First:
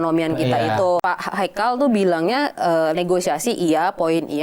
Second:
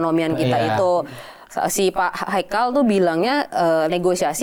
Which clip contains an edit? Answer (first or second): first